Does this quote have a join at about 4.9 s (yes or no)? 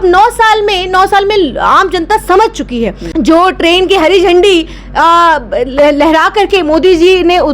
no